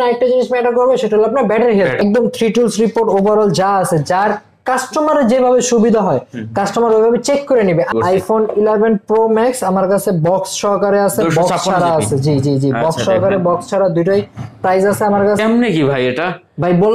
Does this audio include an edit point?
yes; 3 cuts; at 2.0 s, 7.9 s, 15.4 s

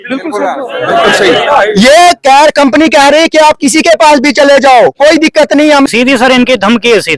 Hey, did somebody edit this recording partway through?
yes; 1 cut; at 5.9 s

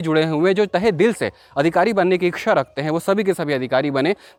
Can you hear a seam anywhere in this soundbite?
no; 0 cuts

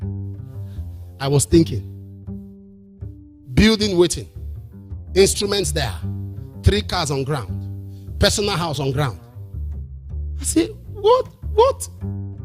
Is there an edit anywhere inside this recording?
yes; 2 cuts; at 1.8 s, 3.2 s

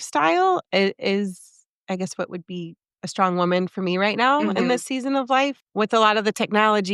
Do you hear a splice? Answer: no; 0 cuts

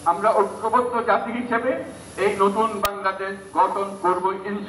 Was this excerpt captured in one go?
yes; 0 cuts

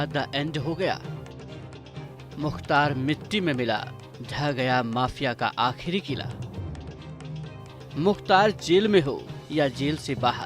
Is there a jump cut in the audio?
no; 0 cuts

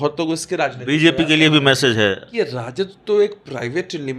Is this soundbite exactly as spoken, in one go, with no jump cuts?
no; 1 cut; at 2.3 s

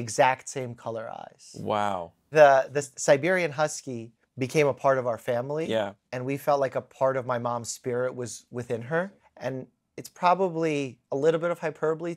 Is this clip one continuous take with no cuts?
no; 1 cut; at 9.2 s

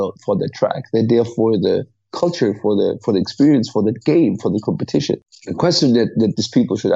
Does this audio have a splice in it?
yes; 1 cut; at 5.3 s

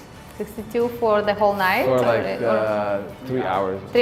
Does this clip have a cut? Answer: no; 0 cuts

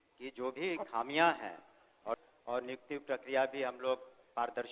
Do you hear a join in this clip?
yes; 1 cut; at 2.2 s

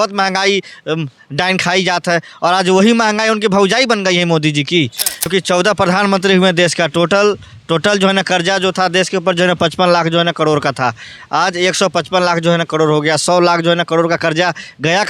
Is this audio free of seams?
no; 1 cut; at 5.3 s

